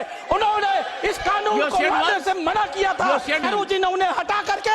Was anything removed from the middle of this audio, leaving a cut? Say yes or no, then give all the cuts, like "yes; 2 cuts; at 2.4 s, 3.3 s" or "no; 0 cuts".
yes; 1 cut; at 3.4 s